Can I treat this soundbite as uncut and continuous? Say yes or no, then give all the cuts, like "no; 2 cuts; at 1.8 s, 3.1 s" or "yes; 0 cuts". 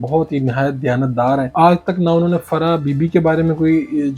no; 1 cut; at 1.5 s